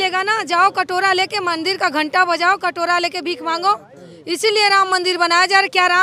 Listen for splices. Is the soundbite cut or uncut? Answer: uncut